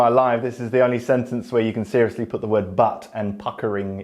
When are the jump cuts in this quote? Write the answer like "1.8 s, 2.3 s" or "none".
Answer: none